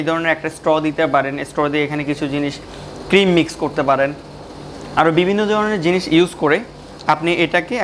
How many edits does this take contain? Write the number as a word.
zero